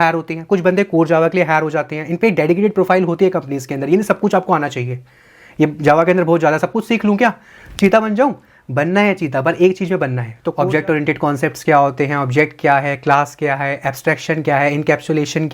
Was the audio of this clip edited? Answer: yes; 1 cut; at 10.5 s

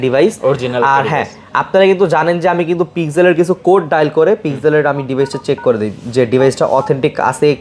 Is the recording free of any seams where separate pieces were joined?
yes; 0 cuts

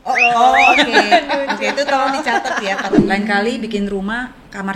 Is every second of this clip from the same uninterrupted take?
no; 1 cut; at 2.9 s

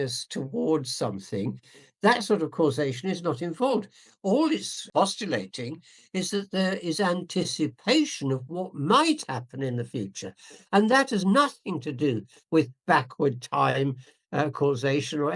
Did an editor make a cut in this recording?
yes; 1 cut; at 4.8 s

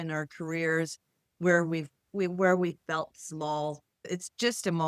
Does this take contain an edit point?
yes; 1 cut; at 4.0 s

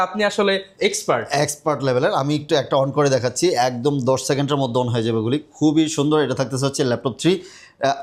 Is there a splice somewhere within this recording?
no; 0 cuts

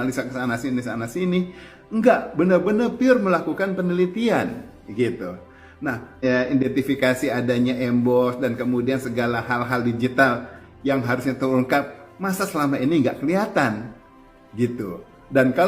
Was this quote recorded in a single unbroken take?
no; 1 cut; at 6.2 s

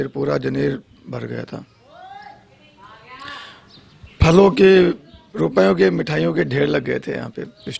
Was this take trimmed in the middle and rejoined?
no; 0 cuts

